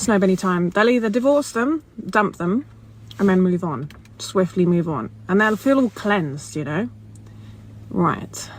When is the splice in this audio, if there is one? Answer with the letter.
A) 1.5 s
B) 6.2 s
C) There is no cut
A